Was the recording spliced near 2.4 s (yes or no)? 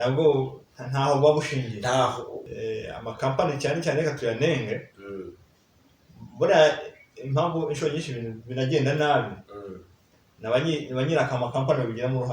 yes